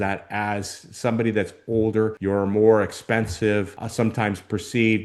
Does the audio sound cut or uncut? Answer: cut